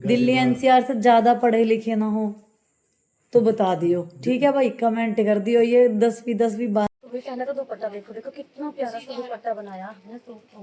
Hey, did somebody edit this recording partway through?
yes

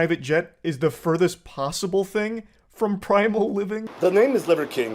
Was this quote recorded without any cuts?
no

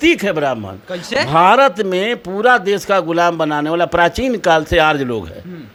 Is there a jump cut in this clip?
no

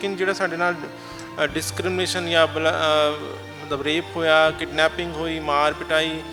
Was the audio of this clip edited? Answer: no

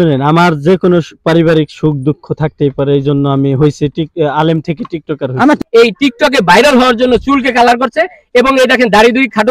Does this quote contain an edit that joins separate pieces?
yes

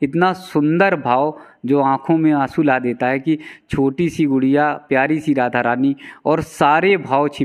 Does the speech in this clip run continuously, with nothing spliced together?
yes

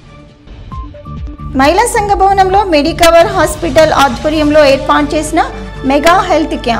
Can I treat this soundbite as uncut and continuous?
no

